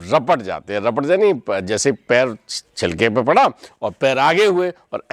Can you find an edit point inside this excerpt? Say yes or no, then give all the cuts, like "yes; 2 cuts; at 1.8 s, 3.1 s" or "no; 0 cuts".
no; 0 cuts